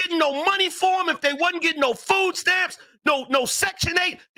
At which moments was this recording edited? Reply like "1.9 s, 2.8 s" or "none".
none

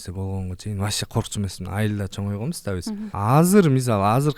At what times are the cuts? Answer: 3.1 s

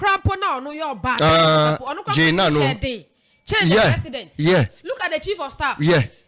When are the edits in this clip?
none

